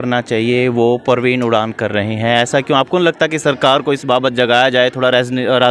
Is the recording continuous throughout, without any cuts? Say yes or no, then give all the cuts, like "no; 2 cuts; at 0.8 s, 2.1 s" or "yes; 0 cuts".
yes; 0 cuts